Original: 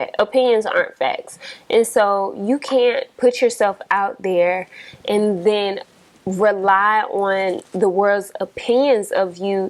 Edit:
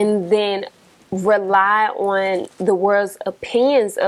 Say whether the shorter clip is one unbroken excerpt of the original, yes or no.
yes